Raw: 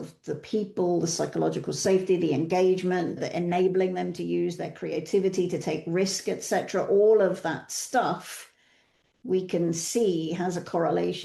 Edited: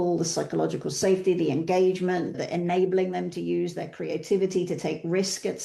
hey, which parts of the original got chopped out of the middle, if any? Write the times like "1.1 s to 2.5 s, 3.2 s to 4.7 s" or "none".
none